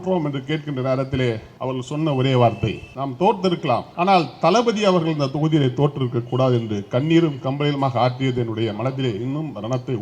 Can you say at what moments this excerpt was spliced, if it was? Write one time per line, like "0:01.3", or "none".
0:01.5
0:02.9
0:03.9